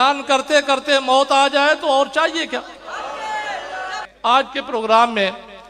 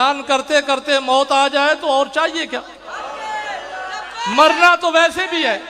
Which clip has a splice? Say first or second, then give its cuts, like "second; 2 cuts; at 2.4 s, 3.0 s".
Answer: first; 1 cut; at 4.0 s